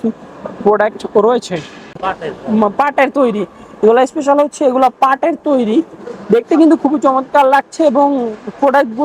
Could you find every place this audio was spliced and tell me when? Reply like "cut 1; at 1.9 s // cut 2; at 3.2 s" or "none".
cut 1; at 2.0 s